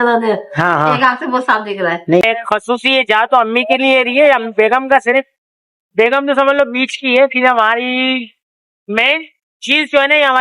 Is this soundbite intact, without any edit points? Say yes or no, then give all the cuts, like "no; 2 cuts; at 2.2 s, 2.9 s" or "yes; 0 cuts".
no; 1 cut; at 2.2 s